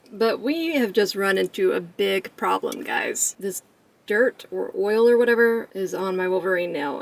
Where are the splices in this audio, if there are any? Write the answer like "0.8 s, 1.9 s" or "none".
3.3 s, 5.7 s